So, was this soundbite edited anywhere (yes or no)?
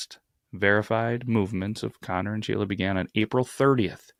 no